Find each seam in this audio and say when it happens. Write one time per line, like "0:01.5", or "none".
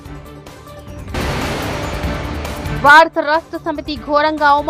0:01.1
0:02.7

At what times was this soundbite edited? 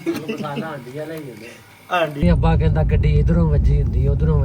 0:02.2

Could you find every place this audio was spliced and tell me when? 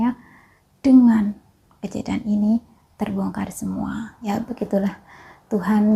0:04.3

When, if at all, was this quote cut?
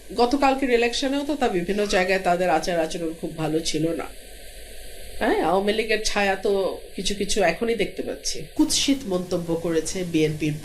0:08.4

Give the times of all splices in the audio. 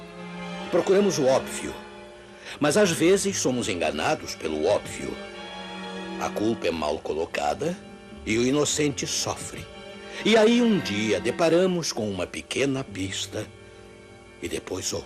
none

